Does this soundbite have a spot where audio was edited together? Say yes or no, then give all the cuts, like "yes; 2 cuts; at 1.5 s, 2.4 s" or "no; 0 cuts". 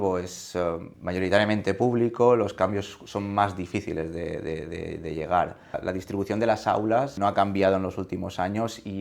yes; 3 cuts; at 0.9 s, 5.8 s, 7.2 s